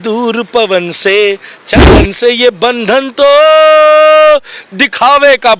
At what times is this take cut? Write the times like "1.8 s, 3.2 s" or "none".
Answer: 1.9 s

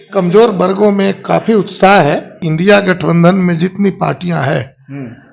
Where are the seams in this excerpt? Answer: 2.4 s

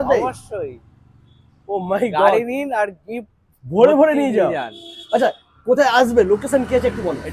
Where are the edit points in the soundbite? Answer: none

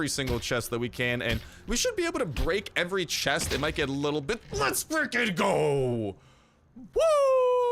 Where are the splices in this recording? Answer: none

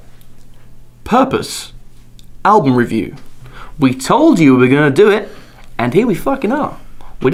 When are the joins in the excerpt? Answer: none

